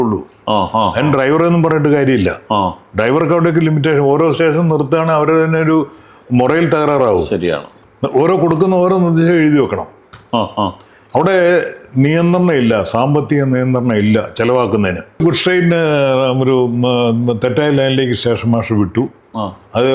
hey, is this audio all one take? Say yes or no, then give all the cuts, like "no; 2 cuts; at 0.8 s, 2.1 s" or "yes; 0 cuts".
no; 2 cuts; at 7.7 s, 15.2 s